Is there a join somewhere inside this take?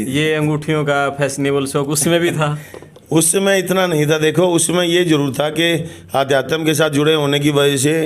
no; 0 cuts

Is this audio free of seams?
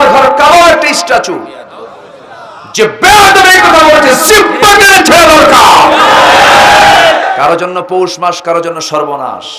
no; 1 cut; at 7.2 s

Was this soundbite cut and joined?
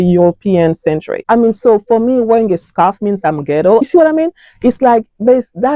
yes; 1 cut; at 1.1 s

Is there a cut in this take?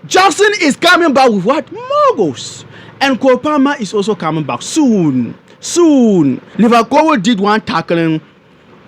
yes; 1 cut; at 6.4 s

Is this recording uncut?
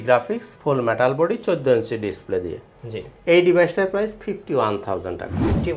yes; 0 cuts

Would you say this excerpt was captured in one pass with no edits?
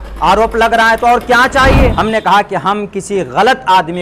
no; 1 cut; at 1.9 s

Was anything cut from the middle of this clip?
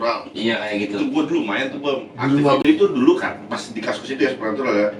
yes; 1 cut; at 2.6 s

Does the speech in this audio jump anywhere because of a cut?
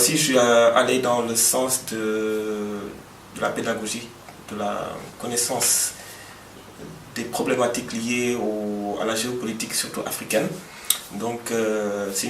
yes; 1 cut; at 4.5 s

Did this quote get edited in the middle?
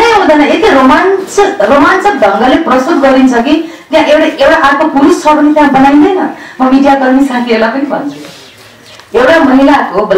no; 0 cuts

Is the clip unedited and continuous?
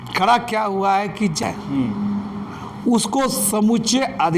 no; 1 cut; at 1.4 s

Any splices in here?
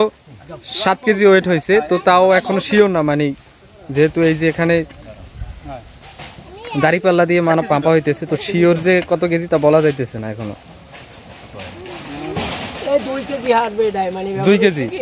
no; 0 cuts

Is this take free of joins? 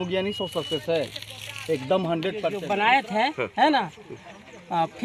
no; 1 cut; at 2.6 s

